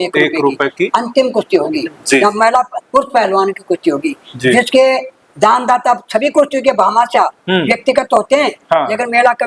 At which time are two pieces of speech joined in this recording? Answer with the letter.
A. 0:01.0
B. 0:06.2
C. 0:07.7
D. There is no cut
D